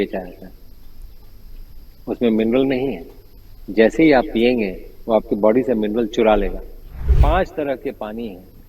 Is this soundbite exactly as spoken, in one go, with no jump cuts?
no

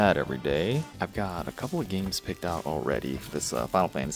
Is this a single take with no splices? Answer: no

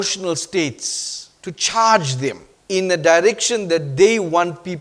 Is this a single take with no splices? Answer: no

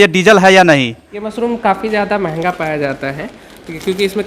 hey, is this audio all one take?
no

